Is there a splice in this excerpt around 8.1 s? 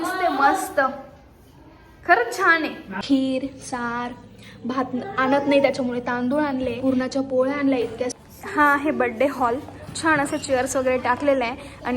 yes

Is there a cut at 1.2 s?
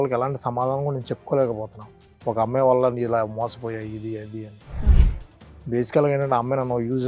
no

